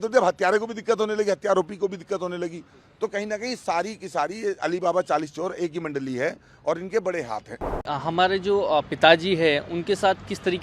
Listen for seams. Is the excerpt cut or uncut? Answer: cut